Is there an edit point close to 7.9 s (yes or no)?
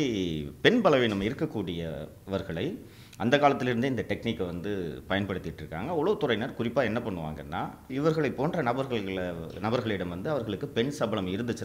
yes